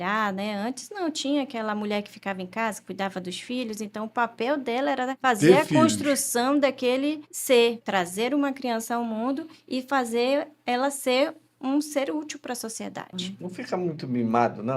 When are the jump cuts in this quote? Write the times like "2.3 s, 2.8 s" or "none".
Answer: 5.2 s, 7.3 s, 7.8 s, 13.1 s